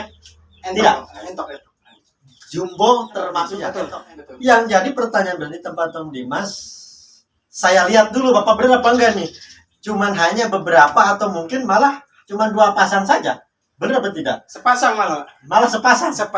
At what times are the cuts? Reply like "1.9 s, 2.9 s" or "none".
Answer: 3.8 s